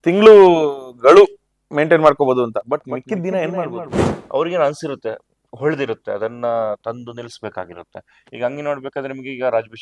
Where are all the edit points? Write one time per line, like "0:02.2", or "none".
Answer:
0:04.1